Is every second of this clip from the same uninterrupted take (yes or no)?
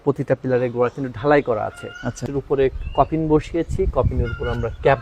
no